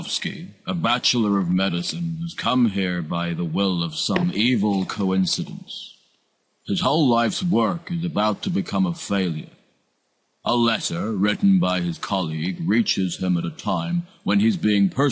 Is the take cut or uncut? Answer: cut